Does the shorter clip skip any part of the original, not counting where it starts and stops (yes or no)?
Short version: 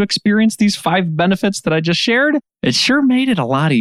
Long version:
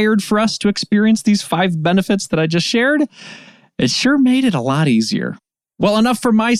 yes